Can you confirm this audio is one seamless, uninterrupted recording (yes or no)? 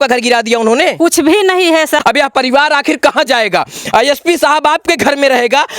no